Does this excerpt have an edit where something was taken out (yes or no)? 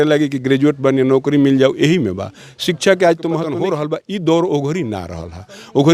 yes